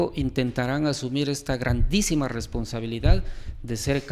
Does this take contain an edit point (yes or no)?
no